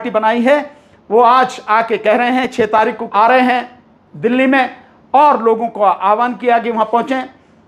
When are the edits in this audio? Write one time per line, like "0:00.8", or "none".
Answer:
0:02.7